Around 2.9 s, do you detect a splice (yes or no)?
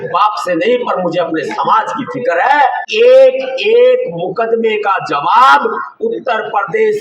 yes